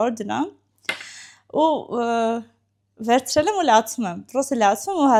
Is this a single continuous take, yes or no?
yes